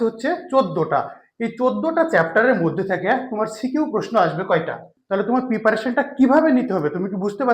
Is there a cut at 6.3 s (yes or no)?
no